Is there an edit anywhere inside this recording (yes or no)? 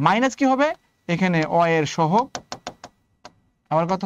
no